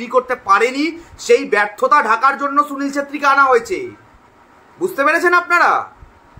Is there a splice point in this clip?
no; 0 cuts

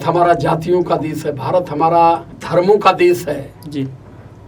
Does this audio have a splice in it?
yes; 1 cut; at 2.3 s

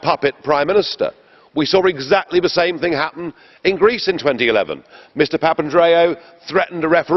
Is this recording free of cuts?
yes; 0 cuts

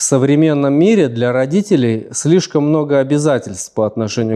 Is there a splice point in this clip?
no; 0 cuts

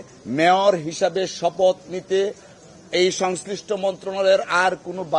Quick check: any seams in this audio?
no; 0 cuts

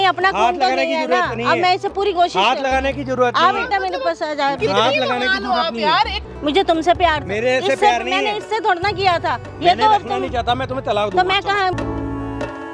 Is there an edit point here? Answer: yes; 2 cuts; at 6.2 s, 11.7 s

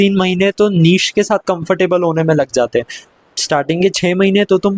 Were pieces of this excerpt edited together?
no; 0 cuts

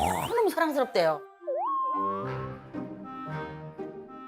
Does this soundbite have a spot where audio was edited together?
no; 0 cuts

